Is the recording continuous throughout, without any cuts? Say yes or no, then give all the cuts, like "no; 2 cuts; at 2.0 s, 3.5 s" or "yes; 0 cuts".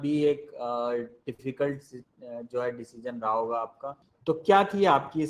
no; 1 cut; at 4.1 s